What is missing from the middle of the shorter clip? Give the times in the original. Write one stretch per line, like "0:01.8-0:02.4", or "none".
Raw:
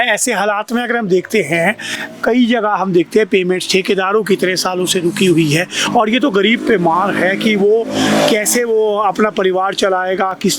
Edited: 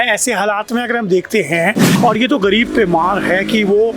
0:01.9-0:05.8